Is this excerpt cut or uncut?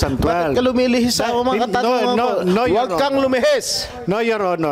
uncut